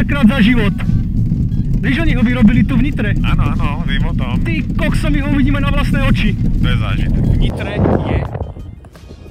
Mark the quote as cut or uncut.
cut